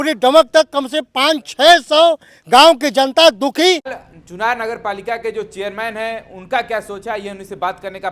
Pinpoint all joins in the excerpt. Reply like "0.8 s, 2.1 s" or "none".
4.0 s